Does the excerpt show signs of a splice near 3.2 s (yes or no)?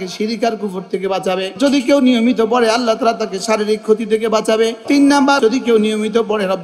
no